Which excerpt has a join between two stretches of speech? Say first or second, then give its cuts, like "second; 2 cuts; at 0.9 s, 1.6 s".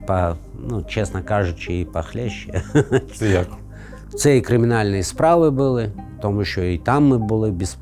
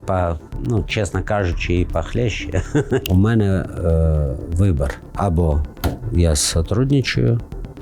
second; 2 cuts; at 3.0 s, 5.0 s